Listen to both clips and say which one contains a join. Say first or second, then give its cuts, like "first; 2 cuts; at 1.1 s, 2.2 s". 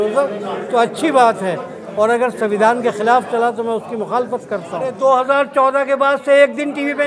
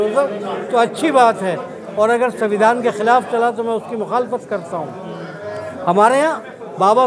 first; 1 cut; at 4.9 s